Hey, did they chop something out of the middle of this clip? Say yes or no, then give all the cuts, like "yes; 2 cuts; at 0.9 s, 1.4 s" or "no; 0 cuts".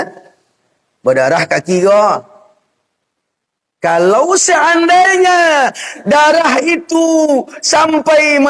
no; 0 cuts